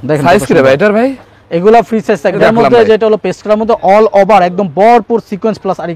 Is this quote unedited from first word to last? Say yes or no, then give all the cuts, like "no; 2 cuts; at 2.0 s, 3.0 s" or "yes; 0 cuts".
no; 1 cut; at 2.4 s